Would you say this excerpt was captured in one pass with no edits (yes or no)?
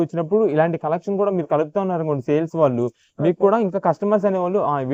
yes